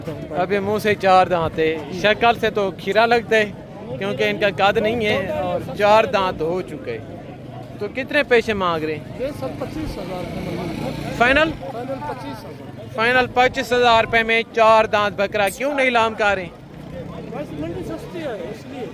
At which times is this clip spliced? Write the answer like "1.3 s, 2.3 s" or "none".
none